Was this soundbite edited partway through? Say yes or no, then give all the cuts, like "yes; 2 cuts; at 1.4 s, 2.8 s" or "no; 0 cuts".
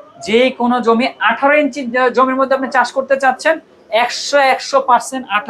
no; 0 cuts